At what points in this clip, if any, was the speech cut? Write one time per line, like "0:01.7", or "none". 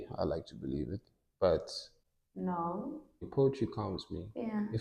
0:03.2